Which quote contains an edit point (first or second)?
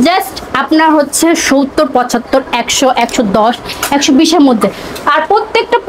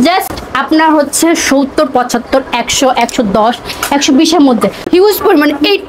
second